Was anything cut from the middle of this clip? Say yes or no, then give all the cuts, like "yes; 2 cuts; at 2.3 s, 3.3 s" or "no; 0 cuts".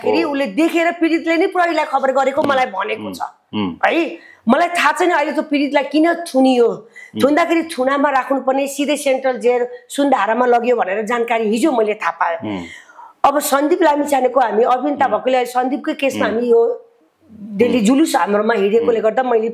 no; 0 cuts